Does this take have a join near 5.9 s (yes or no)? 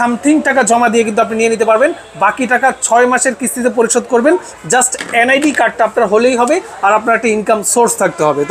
no